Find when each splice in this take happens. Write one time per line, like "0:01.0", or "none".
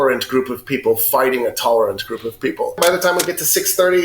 0:02.8